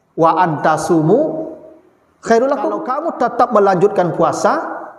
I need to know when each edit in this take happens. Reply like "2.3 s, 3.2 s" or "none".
3.0 s